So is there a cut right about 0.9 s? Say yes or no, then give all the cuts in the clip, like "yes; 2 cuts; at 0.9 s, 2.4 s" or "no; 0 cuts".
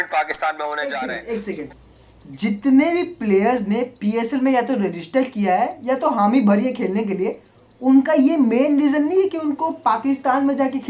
yes; 1 cut; at 0.9 s